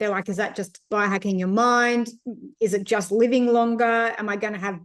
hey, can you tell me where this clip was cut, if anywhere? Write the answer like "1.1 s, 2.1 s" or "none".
none